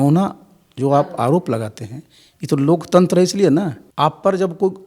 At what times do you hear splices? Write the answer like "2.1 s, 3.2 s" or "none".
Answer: 3.8 s